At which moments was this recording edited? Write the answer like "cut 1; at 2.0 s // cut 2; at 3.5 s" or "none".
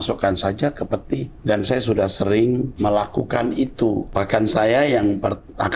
cut 1; at 1.3 s // cut 2; at 2.7 s // cut 3; at 4.1 s